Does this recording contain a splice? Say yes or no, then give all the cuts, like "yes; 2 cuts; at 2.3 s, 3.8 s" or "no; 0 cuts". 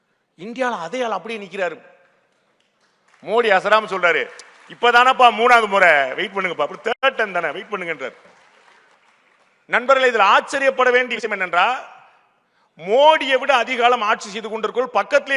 yes; 1 cut; at 8.9 s